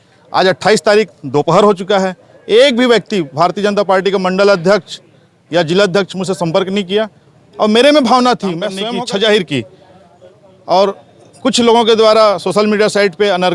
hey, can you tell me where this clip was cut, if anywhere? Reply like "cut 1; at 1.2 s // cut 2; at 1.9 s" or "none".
cut 1; at 8.7 s